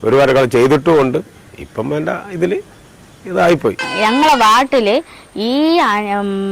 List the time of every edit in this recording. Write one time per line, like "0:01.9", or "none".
0:03.9